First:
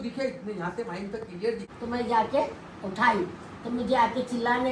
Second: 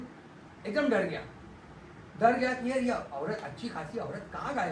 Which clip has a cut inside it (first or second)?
first